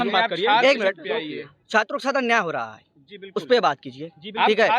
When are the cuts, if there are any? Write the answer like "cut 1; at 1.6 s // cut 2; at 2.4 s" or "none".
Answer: none